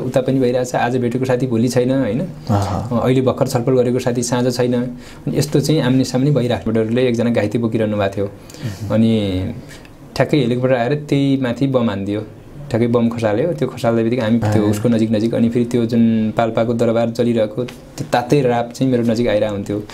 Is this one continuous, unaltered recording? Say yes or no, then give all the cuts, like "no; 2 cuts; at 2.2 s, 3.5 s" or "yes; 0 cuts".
no; 2 cuts; at 6.7 s, 14.4 s